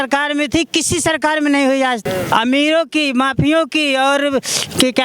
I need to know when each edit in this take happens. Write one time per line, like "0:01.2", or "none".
0:02.0